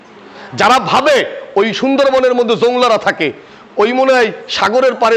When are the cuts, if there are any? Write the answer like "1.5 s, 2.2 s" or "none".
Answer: none